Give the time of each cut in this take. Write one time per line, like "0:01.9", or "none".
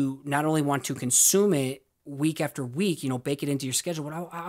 none